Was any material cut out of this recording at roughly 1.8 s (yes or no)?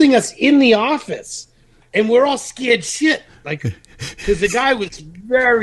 yes